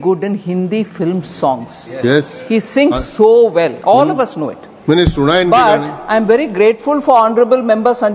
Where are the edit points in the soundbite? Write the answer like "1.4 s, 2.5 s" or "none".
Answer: 3.8 s